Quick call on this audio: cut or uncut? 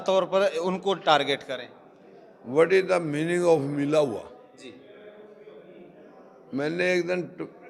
uncut